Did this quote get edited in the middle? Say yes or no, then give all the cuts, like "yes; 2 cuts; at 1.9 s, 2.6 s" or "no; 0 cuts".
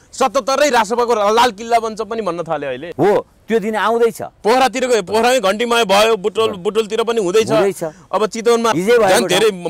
yes; 2 cuts; at 2.8 s, 8.7 s